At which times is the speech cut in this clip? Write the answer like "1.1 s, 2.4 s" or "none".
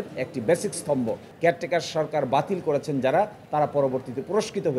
1.3 s